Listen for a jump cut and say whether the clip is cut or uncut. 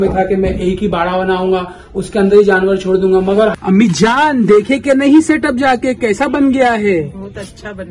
cut